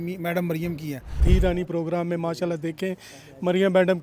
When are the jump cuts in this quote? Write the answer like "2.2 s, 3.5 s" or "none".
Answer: 1.2 s